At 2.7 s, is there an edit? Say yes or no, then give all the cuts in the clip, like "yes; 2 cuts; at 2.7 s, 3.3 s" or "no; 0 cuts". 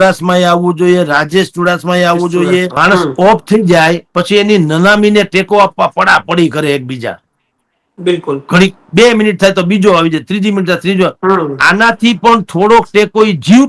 yes; 1 cut; at 2.7 s